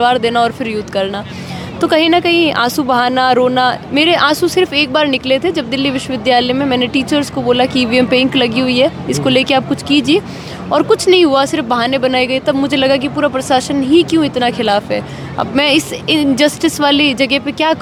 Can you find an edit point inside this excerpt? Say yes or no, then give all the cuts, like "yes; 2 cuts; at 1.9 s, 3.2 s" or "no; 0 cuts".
no; 0 cuts